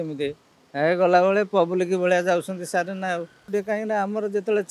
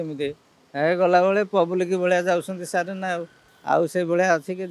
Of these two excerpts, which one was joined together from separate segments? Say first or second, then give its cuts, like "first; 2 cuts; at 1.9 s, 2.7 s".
first; 1 cut; at 3.5 s